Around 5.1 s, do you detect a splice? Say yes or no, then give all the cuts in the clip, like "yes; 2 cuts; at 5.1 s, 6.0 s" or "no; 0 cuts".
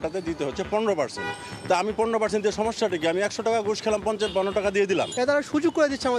yes; 1 cut; at 5.1 s